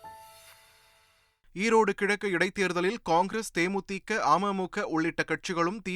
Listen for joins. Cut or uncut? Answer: uncut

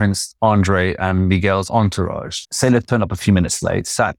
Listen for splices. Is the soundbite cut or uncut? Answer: cut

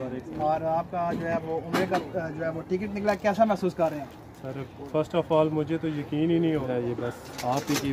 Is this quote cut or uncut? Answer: cut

